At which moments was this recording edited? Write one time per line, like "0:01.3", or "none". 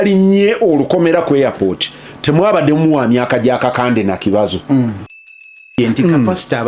0:05.3